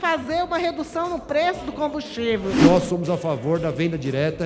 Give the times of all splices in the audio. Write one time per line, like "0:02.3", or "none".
0:02.6